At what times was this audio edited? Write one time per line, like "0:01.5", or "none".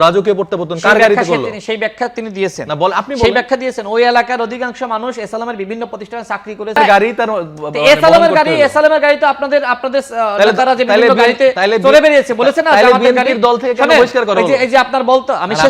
0:06.8